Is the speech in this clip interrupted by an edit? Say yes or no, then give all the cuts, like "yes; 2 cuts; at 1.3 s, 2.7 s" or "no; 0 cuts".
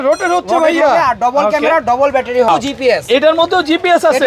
yes; 1 cut; at 2.5 s